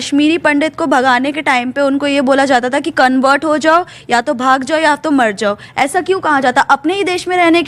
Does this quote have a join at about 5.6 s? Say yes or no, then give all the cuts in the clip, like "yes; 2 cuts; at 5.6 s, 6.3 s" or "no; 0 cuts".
no; 0 cuts